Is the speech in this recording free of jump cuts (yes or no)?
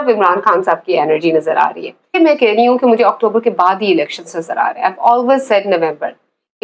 no